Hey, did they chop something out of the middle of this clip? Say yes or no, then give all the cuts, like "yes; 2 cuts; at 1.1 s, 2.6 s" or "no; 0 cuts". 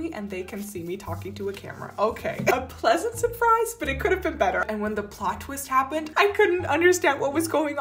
yes; 2 cuts; at 2.5 s, 4.6 s